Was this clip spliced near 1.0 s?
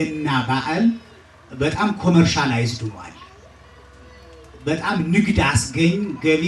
no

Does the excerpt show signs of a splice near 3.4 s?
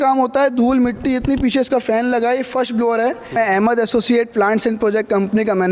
yes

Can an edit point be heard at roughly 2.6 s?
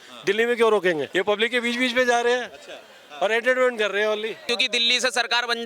no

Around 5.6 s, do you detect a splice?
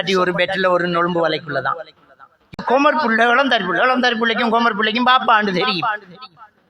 no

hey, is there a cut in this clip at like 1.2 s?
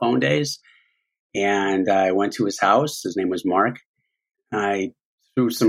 no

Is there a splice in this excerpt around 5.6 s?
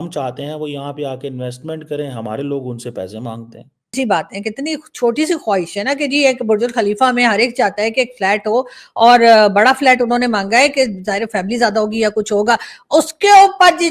no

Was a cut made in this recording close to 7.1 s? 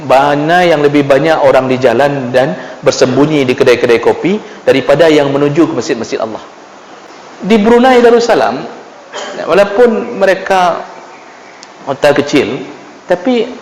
yes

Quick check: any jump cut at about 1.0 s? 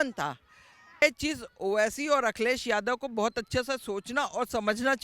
yes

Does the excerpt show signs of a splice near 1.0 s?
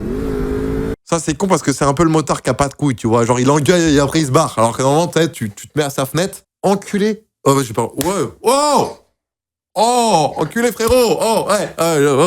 yes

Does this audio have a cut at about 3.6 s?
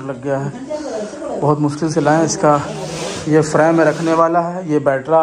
no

